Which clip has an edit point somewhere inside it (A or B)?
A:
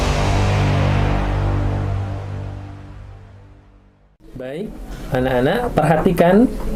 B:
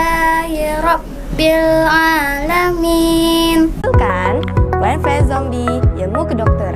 B